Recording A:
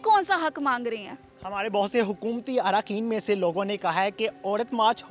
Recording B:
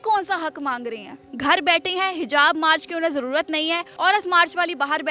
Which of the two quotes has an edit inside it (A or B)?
B